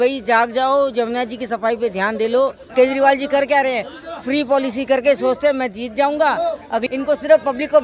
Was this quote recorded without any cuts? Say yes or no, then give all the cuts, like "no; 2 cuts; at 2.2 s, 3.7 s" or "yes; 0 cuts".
no; 2 cuts; at 2.7 s, 6.9 s